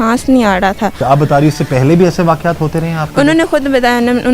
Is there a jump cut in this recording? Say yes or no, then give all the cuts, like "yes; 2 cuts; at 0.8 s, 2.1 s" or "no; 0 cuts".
yes; 1 cut; at 1.0 s